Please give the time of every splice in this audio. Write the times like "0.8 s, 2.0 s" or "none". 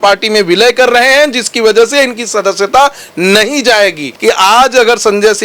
4.1 s